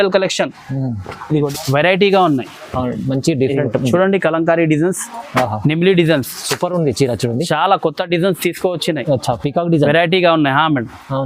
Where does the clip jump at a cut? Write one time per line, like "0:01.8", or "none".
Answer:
0:01.5